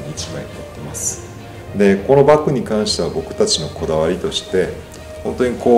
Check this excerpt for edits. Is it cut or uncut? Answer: uncut